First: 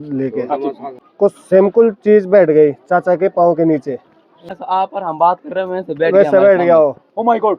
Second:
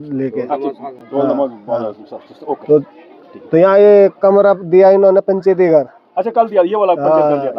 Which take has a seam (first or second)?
first